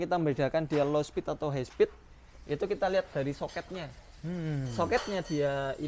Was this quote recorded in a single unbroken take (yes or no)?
yes